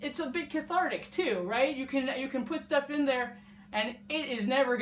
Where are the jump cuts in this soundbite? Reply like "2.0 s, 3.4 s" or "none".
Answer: none